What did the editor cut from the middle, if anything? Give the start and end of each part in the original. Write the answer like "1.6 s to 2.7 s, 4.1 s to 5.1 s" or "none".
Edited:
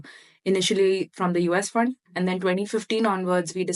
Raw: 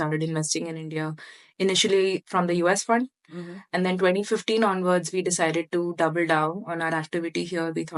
3.2 s to 3.6 s